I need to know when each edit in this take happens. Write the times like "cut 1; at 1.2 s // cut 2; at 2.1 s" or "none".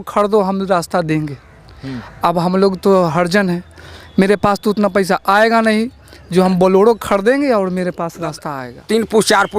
cut 1; at 8.4 s